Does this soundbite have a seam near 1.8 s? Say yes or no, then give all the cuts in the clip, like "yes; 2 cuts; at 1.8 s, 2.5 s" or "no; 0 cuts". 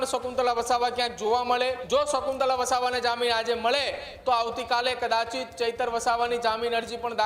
yes; 1 cut; at 1.8 s